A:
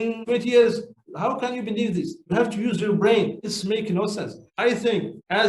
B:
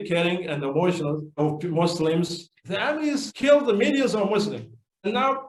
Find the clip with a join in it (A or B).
A